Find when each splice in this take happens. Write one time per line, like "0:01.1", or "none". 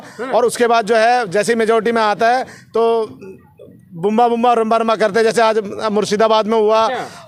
none